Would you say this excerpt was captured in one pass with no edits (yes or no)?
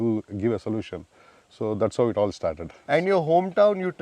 yes